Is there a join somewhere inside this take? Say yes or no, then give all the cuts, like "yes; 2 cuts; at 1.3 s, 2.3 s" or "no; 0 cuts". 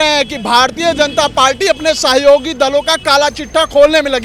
no; 0 cuts